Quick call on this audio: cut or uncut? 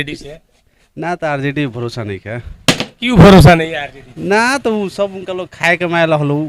uncut